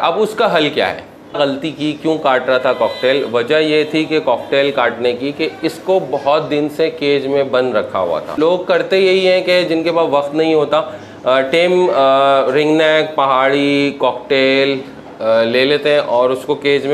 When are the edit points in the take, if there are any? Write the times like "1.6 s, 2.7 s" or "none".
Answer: 1.4 s, 8.4 s